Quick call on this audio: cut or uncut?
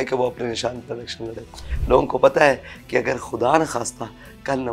cut